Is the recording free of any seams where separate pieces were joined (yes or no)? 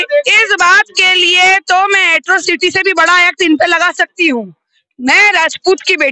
yes